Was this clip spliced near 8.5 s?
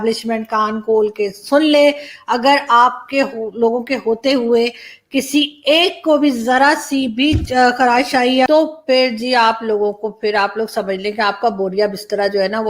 yes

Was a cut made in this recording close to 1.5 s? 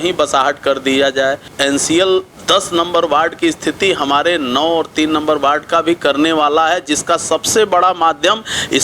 yes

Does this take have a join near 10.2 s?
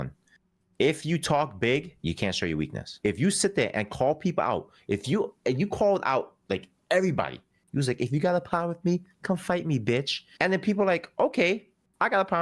yes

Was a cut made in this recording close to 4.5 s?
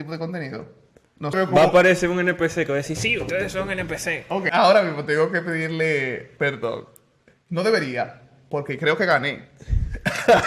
yes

